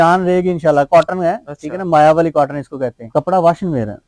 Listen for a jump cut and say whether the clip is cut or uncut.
cut